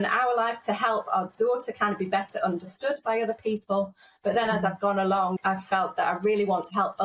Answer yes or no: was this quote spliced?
no